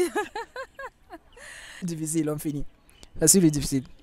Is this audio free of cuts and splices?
no; 1 cut; at 1.8 s

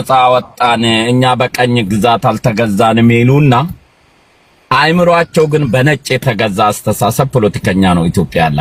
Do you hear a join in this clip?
no; 0 cuts

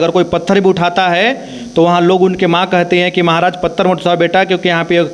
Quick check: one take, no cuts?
yes; 0 cuts

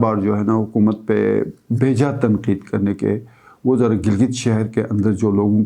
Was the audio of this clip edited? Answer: no; 0 cuts

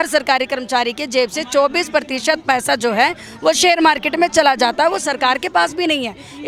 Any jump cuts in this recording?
no; 0 cuts

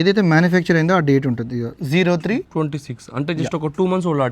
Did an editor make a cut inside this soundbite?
yes; 2 cuts; at 1.8 s, 2.5 s

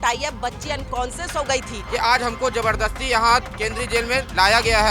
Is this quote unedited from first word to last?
no; 1 cut; at 1.8 s

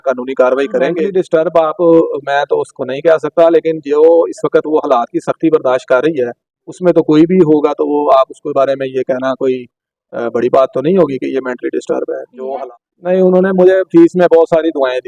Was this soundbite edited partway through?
yes; 2 cuts; at 1.0 s, 12.4 s

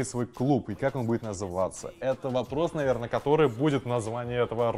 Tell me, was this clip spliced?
no; 0 cuts

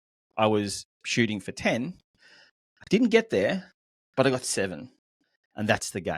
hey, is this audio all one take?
yes; 0 cuts

